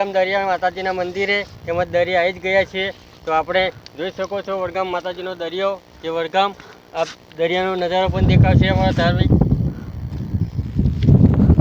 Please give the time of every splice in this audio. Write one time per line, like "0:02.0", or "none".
none